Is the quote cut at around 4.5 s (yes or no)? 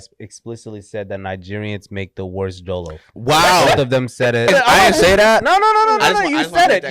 yes